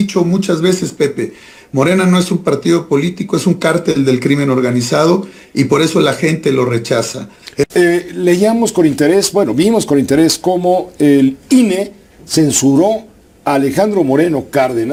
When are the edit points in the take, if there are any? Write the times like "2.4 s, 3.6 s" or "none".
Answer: none